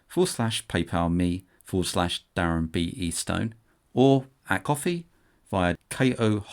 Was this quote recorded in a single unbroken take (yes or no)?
no